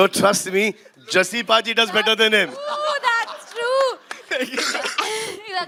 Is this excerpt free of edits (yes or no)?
yes